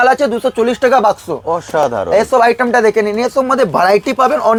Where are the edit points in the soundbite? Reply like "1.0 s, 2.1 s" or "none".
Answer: none